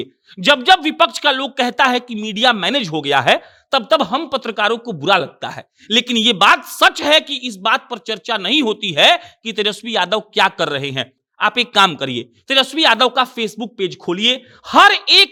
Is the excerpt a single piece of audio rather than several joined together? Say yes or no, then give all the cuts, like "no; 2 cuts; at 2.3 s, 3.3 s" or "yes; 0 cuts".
yes; 0 cuts